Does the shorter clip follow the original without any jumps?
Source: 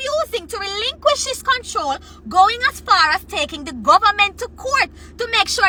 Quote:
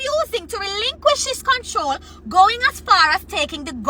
yes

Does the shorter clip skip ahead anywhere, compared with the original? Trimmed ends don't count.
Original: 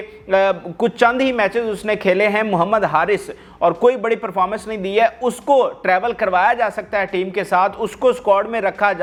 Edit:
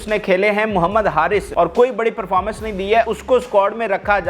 yes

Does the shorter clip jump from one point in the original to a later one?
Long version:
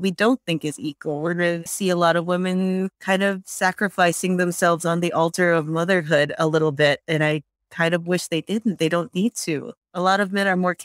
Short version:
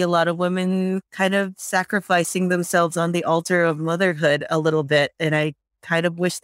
no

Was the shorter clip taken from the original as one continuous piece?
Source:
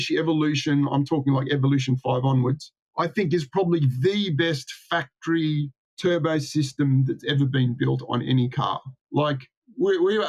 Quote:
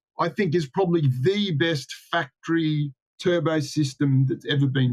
yes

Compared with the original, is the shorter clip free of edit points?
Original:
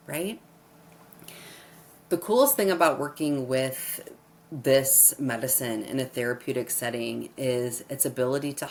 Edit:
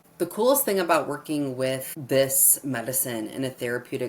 no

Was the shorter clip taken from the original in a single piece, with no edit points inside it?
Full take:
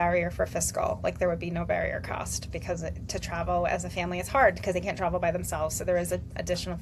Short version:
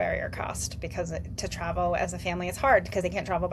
yes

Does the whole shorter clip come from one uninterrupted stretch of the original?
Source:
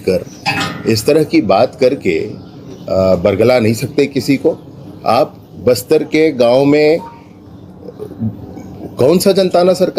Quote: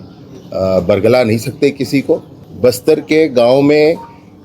no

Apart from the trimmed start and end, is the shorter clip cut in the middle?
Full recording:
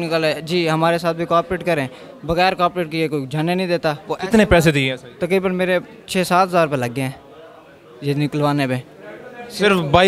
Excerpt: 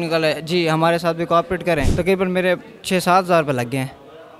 yes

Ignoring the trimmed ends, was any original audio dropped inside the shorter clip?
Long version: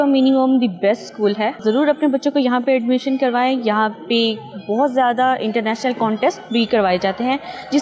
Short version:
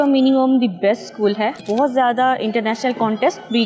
yes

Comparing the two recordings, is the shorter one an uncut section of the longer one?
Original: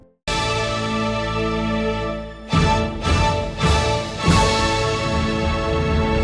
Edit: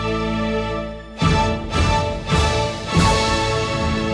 yes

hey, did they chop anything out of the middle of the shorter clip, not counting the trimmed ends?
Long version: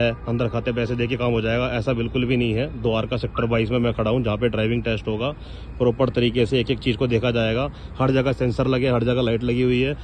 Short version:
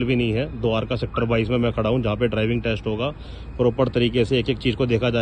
no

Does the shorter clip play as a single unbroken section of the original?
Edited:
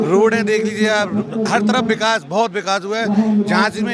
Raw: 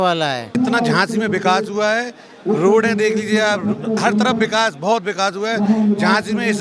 yes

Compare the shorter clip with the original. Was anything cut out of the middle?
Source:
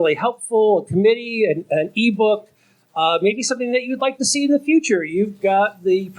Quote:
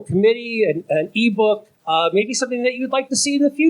yes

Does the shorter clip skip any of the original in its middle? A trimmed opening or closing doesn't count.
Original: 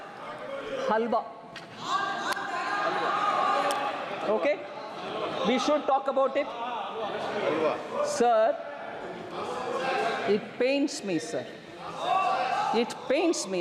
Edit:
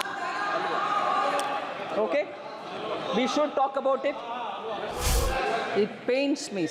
yes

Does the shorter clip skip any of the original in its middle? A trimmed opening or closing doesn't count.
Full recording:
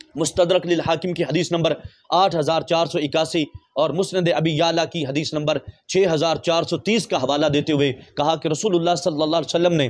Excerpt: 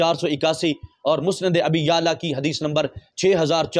no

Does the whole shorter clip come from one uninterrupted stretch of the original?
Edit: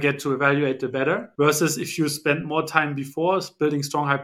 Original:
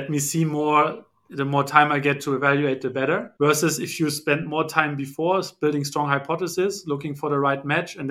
yes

